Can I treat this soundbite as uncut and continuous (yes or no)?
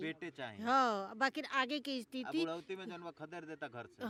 yes